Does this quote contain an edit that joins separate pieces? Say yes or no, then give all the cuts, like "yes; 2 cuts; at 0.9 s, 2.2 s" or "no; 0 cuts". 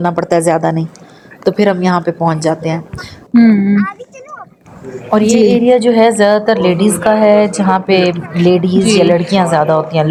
no; 0 cuts